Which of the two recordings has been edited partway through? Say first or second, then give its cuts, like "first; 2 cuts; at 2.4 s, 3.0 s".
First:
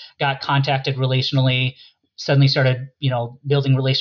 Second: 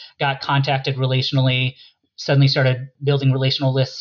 second; 1 cut; at 2.9 s